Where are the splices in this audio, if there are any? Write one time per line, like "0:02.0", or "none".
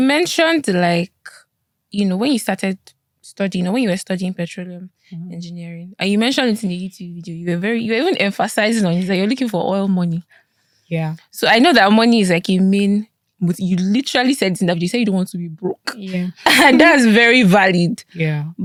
none

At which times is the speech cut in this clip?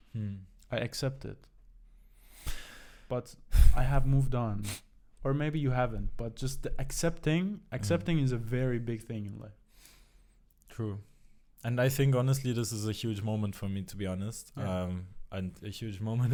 none

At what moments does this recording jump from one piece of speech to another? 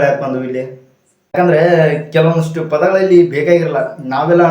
0:01.3

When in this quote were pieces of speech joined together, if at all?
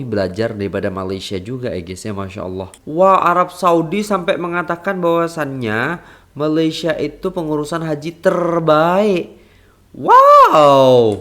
0:02.7

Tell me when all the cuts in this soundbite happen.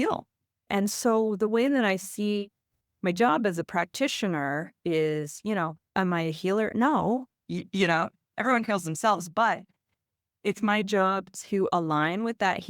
none

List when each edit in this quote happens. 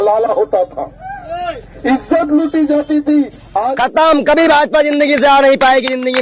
0:03.7

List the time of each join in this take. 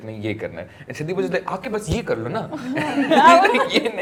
none

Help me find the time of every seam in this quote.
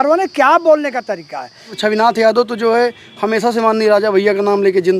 0:01.7

